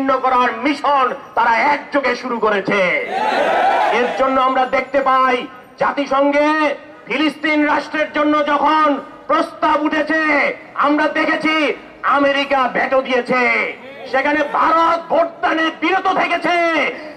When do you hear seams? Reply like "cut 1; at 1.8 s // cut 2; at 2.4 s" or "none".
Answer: none